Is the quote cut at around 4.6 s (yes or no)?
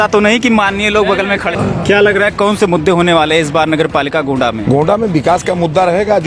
yes